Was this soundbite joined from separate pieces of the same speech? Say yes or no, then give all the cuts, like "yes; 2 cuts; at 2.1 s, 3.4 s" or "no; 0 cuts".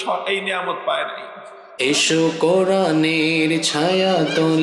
yes; 1 cut; at 1.7 s